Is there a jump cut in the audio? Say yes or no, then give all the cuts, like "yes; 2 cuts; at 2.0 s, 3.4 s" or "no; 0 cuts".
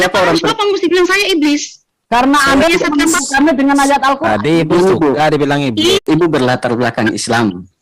yes; 1 cut; at 6.0 s